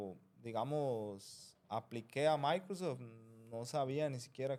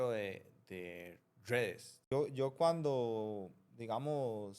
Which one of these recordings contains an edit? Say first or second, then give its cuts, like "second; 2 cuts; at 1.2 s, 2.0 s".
second; 1 cut; at 2.0 s